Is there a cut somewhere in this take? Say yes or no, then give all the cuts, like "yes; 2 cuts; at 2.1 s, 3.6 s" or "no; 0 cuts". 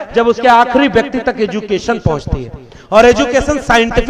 no; 0 cuts